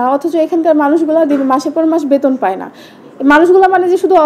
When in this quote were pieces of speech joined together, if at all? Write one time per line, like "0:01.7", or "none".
none

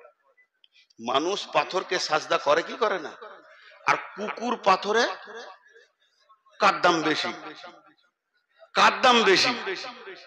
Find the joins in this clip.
none

